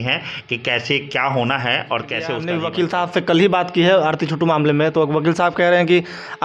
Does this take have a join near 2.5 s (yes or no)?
yes